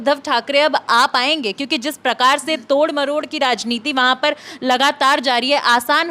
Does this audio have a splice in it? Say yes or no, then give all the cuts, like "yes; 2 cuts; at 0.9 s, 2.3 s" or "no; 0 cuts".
no; 0 cuts